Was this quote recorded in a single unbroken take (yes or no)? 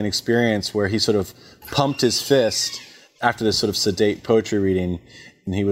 yes